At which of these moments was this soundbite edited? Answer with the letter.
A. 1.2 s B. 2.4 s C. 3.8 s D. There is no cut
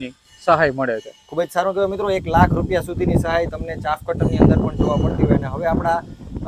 D